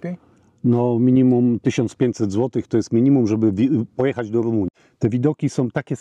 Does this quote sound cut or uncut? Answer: cut